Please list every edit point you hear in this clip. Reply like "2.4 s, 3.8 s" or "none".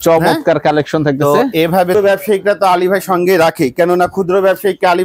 1.9 s

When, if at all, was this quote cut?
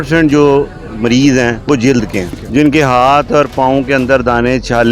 2.4 s

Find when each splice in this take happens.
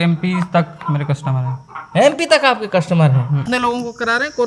3.5 s

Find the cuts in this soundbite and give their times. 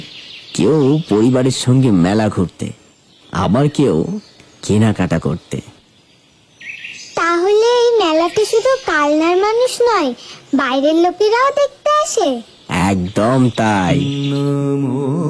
14.0 s

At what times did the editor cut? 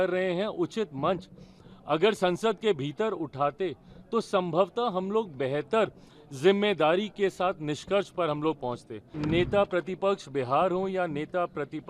9.1 s

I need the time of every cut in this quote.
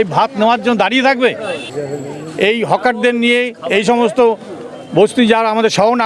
1.7 s

